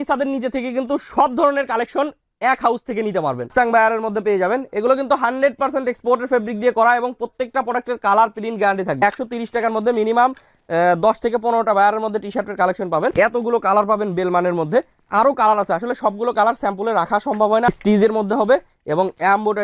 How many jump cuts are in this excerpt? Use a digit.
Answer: 4